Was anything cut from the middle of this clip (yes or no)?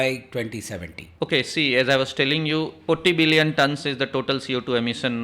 yes